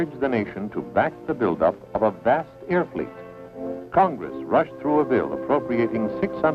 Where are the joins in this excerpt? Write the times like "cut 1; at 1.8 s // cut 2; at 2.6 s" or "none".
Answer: cut 1; at 2.9 s